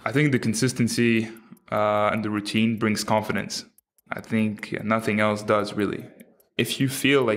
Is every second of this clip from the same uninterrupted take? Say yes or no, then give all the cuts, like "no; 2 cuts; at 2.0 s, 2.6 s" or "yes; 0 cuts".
yes; 0 cuts